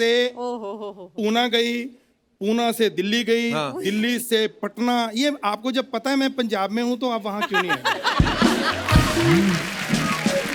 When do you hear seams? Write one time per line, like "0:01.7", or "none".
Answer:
none